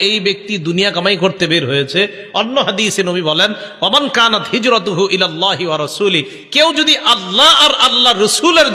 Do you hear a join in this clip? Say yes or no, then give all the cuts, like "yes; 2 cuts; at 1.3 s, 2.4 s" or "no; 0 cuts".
no; 0 cuts